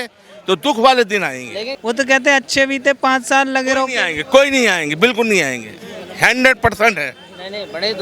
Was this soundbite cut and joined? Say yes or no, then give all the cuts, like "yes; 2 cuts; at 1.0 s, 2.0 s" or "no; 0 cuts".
yes; 1 cut; at 1.6 s